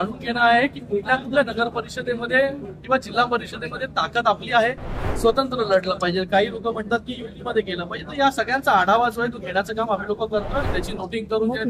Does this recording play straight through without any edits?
no; 2 cuts; at 5.0 s, 10.6 s

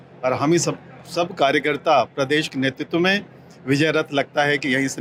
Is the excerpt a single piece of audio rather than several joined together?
yes; 0 cuts

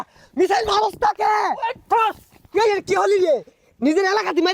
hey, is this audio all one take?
yes; 0 cuts

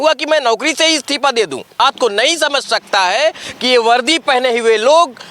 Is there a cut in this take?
yes; 1 cut; at 1.8 s

